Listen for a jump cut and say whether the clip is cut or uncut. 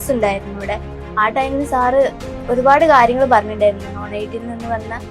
uncut